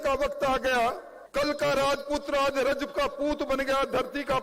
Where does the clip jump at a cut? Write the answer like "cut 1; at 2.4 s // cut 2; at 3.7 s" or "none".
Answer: cut 1; at 1.1 s